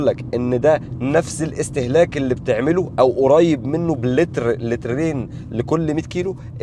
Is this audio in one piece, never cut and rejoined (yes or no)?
yes